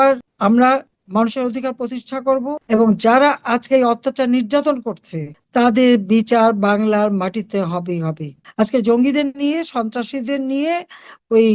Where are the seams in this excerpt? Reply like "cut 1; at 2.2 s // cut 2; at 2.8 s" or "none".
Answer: cut 1; at 8.4 s